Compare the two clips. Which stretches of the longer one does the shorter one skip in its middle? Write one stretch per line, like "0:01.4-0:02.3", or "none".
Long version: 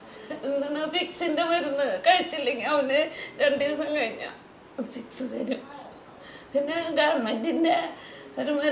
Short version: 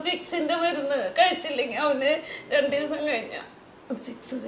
none